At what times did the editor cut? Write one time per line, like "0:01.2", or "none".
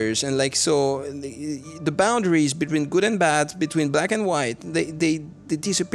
none

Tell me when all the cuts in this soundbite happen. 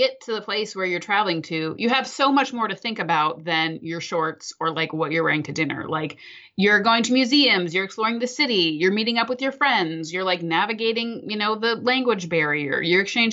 none

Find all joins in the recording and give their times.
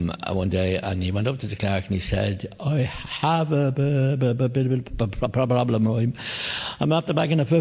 none

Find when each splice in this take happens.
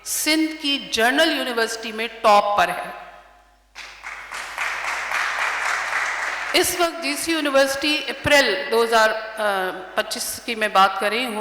none

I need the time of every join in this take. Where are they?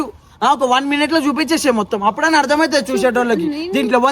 none

